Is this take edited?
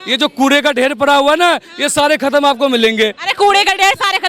no; 0 cuts

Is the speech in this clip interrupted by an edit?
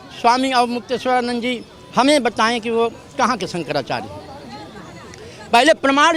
no; 0 cuts

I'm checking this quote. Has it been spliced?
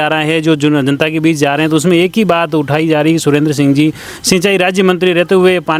no; 0 cuts

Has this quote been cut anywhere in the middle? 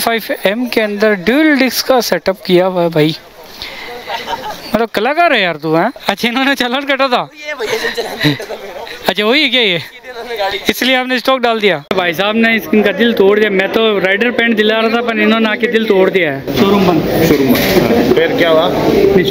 yes; 3 cuts; at 6.0 s, 11.9 s, 16.5 s

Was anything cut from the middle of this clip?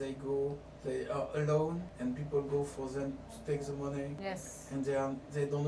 yes; 2 cuts; at 1.9 s, 4.2 s

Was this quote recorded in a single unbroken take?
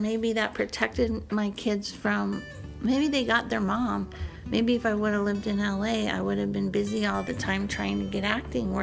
yes; 0 cuts

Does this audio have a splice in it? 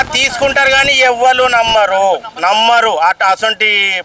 no; 0 cuts

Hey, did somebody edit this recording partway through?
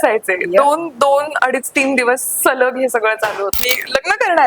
yes; 1 cut; at 3.5 s

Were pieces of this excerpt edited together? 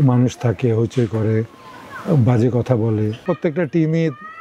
yes; 1 cut; at 3.2 s

